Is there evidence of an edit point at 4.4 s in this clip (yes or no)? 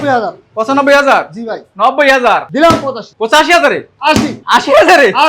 yes